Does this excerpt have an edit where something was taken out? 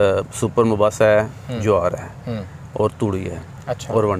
no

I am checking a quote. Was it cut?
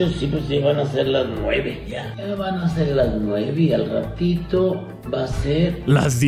no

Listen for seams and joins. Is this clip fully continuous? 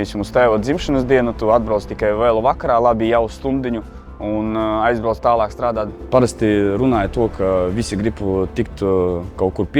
no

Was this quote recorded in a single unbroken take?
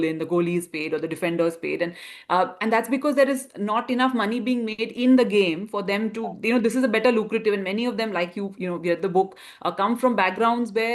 yes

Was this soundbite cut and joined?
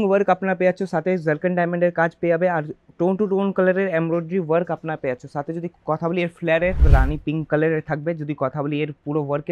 yes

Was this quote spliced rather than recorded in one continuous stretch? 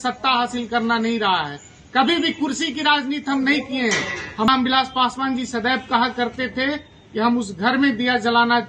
yes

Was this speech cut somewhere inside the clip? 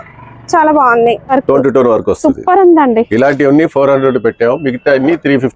yes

